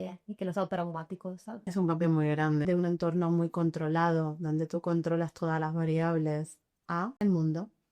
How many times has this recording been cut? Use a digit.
3